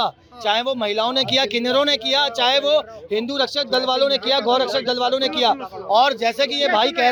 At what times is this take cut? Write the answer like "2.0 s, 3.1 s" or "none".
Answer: none

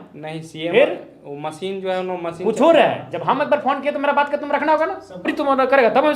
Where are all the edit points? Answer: 5.1 s

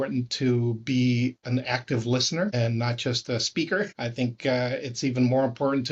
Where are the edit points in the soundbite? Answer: 2.5 s, 3.9 s

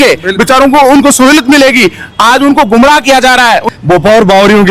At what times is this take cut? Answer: 3.6 s

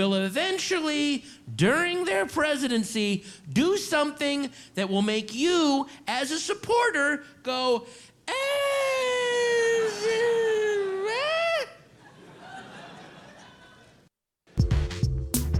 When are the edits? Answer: 14.5 s

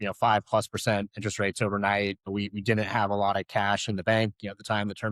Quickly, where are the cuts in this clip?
2.2 s

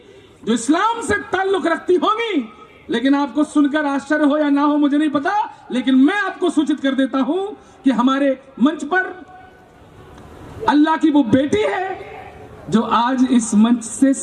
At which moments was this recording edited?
none

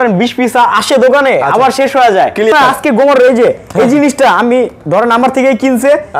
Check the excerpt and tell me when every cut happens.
2.5 s

